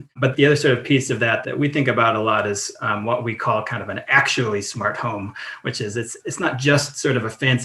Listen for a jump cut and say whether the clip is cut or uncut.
uncut